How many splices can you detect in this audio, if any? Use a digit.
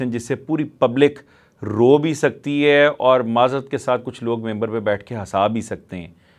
0